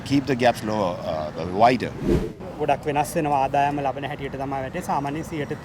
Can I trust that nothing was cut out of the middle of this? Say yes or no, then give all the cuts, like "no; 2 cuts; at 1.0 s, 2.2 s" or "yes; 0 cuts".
no; 1 cut; at 2.3 s